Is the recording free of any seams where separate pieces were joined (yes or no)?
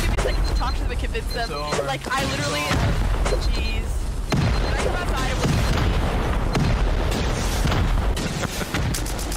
yes